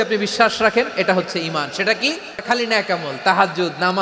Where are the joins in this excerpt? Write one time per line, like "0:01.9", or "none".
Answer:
0:02.4